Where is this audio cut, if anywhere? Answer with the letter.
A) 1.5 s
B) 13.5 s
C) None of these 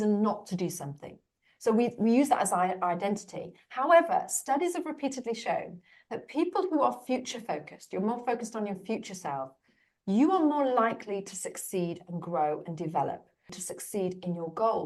B